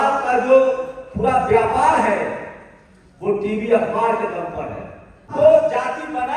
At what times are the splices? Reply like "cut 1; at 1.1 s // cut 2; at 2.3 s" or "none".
cut 1; at 5.3 s